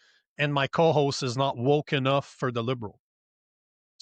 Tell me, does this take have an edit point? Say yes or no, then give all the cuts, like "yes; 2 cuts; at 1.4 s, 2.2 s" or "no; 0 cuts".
no; 0 cuts